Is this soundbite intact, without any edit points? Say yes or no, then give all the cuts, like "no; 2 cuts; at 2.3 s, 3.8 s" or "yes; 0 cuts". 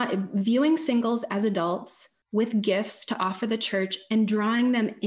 yes; 0 cuts